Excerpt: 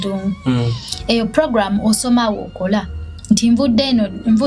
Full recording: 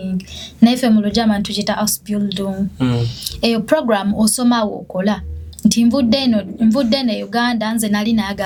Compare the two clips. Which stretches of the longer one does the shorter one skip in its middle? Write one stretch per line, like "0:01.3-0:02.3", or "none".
none